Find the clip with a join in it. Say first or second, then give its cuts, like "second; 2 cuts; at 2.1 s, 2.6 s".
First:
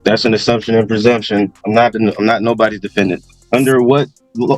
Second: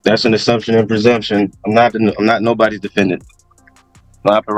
first; 1 cut; at 3.3 s